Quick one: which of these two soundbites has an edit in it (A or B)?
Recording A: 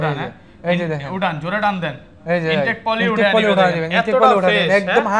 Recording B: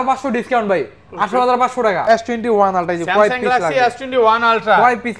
B